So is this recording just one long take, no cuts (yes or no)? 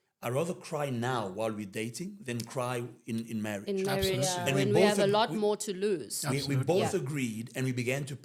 yes